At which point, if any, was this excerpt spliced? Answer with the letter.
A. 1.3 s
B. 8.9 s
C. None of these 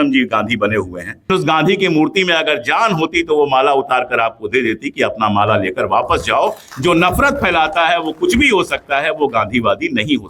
A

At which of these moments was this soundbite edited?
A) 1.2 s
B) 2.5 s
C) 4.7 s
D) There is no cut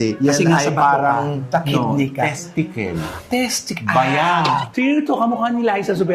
C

